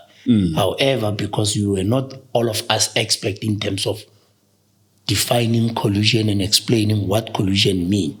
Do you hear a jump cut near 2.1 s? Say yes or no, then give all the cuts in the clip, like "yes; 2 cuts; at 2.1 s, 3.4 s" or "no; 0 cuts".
no; 0 cuts